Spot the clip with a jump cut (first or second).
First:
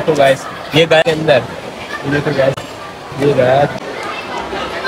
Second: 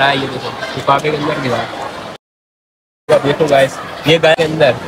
first